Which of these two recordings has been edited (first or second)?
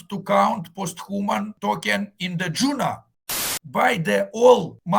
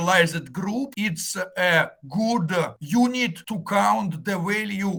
first